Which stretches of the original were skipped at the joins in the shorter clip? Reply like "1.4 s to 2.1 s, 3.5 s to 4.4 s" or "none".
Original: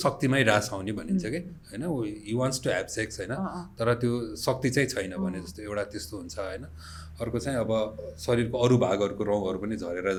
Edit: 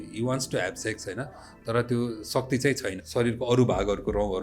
5.1 s to 8.1 s